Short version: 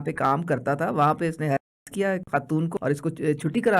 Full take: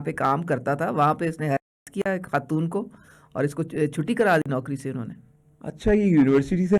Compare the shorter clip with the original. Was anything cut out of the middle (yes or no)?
yes